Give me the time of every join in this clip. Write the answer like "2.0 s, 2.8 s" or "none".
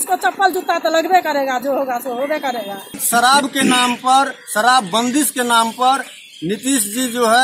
none